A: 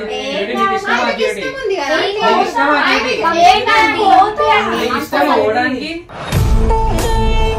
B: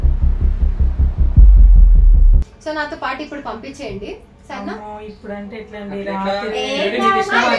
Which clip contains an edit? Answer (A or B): B